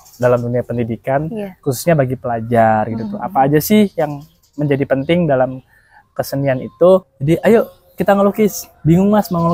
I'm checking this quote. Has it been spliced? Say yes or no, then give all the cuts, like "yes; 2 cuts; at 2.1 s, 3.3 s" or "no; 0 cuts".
yes; 1 cut; at 7.1 s